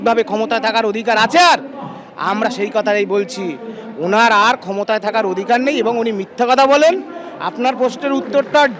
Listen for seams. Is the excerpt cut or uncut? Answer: uncut